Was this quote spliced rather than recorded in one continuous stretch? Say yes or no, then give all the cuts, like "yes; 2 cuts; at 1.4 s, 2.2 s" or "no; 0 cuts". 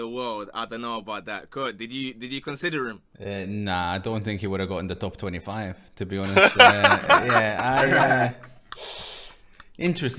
no; 0 cuts